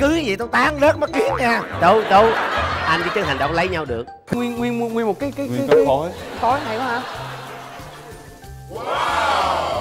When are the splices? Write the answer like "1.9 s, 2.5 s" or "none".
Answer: 4.2 s